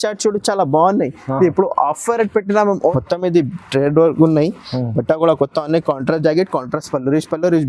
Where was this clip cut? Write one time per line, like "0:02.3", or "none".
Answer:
0:02.9